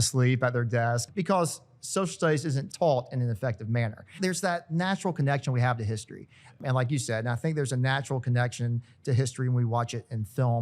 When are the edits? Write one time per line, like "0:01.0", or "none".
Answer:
0:01.0
0:02.6
0:04.1
0:06.6